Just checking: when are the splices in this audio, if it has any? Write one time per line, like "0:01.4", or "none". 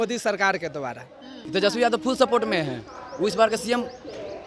0:01.4